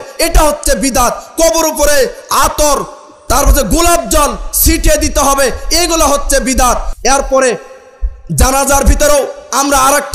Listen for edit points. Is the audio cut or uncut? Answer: uncut